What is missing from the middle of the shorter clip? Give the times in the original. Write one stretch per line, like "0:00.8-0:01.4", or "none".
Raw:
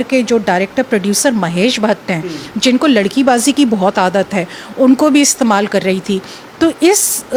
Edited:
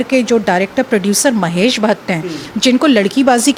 none